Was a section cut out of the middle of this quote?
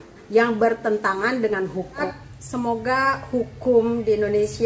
yes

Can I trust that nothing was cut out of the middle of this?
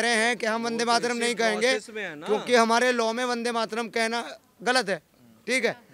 yes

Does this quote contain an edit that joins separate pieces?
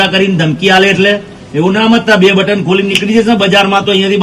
no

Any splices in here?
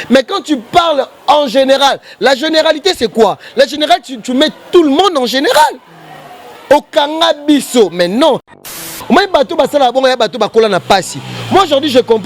yes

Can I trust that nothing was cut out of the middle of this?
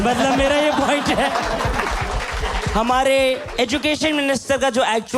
yes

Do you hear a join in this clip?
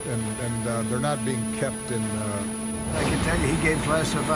yes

